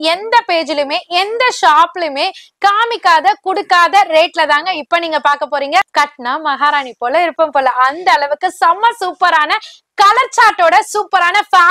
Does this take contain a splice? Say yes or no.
yes